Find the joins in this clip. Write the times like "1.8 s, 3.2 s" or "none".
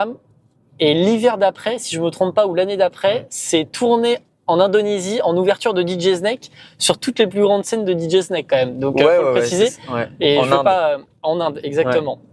none